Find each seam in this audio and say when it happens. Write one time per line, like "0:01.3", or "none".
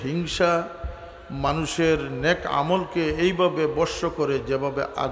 none